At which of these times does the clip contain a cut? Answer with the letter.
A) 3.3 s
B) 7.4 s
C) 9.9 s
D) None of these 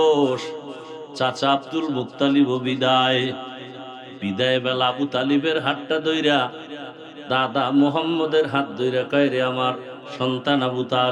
D